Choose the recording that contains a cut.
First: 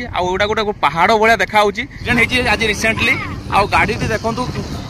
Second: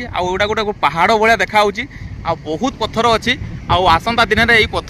first; 1 cut; at 2.0 s

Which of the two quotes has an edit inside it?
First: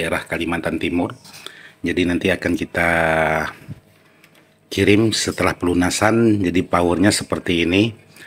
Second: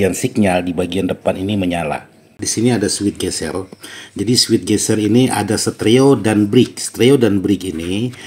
second; 1 cut; at 2.4 s

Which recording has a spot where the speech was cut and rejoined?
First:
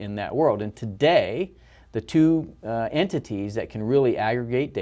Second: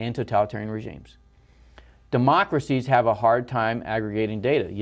second; 1 cut; at 1.0 s

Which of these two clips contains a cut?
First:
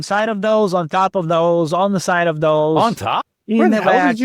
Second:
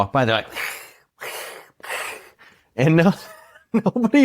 first; 1 cut; at 3.3 s

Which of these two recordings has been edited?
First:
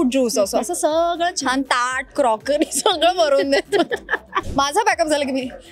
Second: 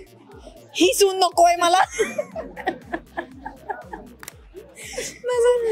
first; 1 cut; at 4.4 s

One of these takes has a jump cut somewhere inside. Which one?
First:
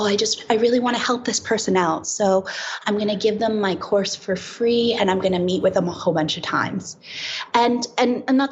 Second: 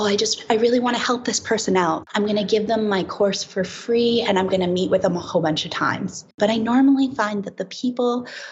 second; 2 cuts; at 2.0 s, 6.4 s

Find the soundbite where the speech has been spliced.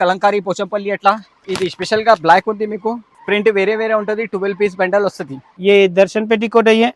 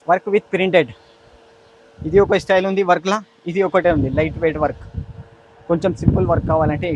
first; 3 cuts; at 1.4 s, 3.1 s, 5.5 s

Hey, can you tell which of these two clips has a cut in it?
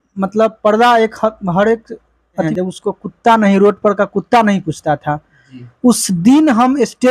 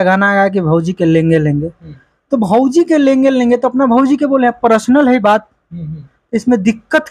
first; 1 cut; at 2.5 s

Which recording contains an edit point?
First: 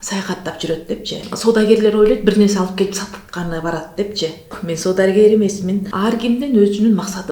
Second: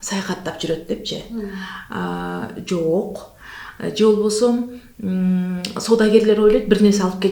first; 3 cuts; at 1.3 s, 4.6 s, 5.9 s

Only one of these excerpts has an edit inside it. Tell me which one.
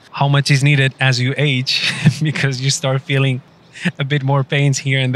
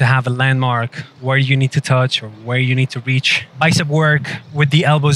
second; 2 cuts; at 1.0 s, 3.4 s

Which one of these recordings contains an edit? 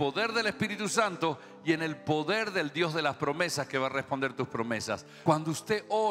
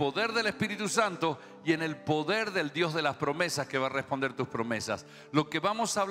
first; 1 cut; at 5.1 s

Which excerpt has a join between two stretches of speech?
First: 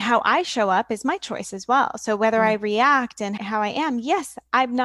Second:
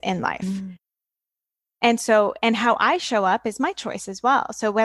first; 1 cut; at 3.4 s

